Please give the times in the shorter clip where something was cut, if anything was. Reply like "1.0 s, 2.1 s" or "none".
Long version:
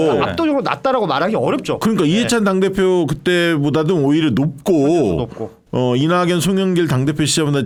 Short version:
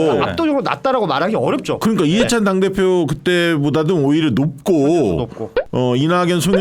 none